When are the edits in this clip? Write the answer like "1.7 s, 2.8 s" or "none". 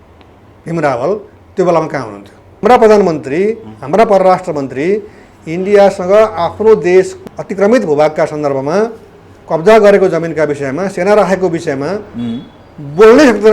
2.5 s, 7.2 s